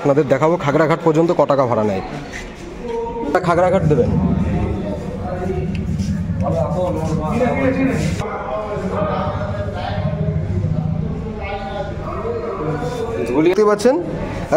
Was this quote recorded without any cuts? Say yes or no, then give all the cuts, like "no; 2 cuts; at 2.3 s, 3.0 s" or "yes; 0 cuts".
no; 3 cuts; at 3.3 s, 8.2 s, 13.5 s